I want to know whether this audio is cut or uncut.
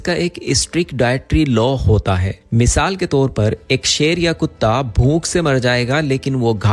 uncut